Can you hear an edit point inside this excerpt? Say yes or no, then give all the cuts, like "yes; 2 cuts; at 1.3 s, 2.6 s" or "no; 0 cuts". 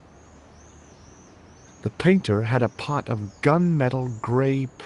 yes; 1 cut; at 1.8 s